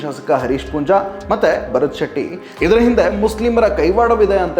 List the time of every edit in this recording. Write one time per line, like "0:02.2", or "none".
0:02.5